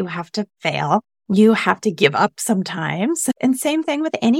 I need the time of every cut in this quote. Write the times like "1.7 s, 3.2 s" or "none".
1.1 s, 3.4 s